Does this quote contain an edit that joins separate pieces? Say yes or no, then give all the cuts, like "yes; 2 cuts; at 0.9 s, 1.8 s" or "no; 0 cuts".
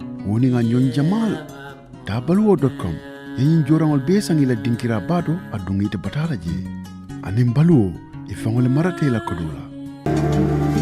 yes; 1 cut; at 9.9 s